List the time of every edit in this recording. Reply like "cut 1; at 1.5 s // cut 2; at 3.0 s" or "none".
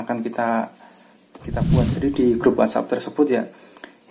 cut 1; at 1.6 s